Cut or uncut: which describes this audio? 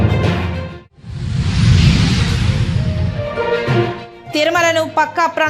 cut